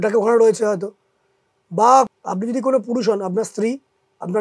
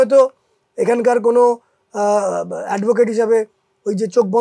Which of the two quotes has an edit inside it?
first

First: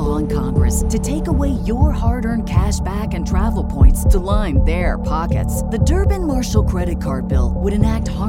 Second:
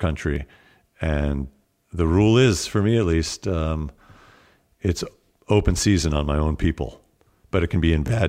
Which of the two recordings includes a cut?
second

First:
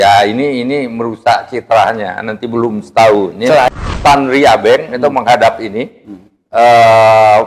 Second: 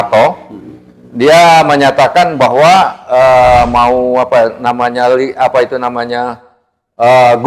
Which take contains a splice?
first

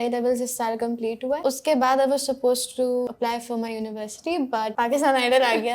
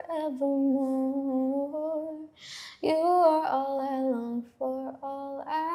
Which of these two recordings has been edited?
first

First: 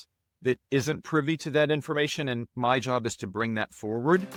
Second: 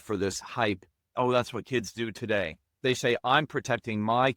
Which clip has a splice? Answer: second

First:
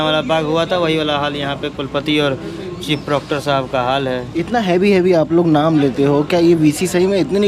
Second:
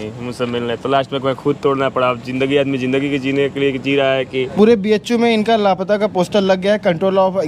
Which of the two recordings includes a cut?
second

